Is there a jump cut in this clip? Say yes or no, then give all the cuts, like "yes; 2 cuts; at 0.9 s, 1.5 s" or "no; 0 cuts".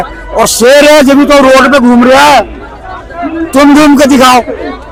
no; 0 cuts